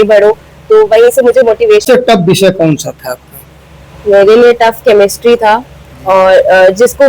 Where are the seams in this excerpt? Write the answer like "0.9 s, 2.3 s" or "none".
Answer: 1.8 s